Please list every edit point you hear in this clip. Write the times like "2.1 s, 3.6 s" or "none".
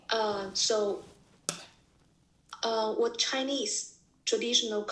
none